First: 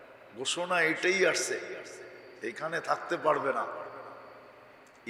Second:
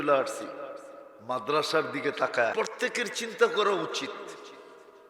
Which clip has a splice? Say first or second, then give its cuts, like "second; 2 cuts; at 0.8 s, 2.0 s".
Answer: second; 1 cut; at 2.5 s